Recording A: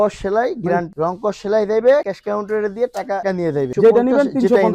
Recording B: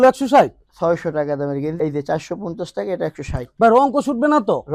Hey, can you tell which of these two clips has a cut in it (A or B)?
A